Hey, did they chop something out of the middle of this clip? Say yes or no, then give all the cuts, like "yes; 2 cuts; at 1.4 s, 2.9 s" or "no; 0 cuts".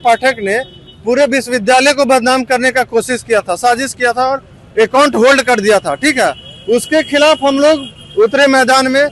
no; 0 cuts